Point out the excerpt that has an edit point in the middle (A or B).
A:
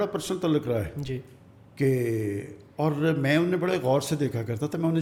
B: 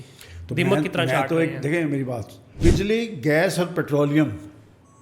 B